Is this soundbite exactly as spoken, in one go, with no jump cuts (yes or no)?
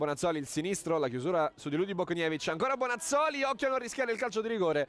no